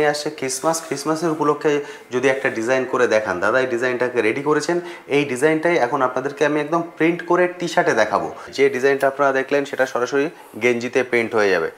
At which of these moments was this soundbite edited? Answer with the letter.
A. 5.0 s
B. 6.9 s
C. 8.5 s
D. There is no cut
C